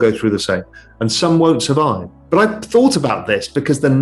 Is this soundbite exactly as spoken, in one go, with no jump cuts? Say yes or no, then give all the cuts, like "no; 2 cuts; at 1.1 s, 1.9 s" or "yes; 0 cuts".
no; 1 cut; at 2.1 s